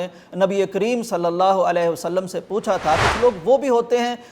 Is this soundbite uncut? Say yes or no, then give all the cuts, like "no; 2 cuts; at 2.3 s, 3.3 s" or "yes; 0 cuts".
no; 1 cut; at 3.0 s